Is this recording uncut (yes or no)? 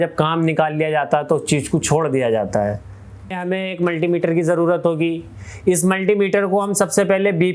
no